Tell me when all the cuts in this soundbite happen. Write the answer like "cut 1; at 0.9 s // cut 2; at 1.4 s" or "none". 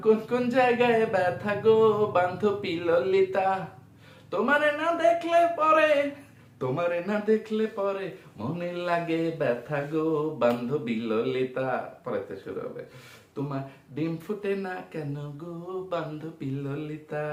none